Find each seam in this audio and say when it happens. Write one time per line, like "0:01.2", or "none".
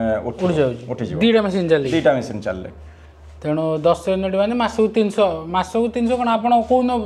none